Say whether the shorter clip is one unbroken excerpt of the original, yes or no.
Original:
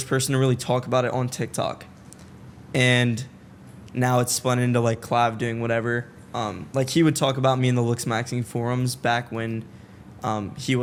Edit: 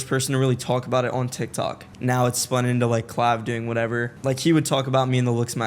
no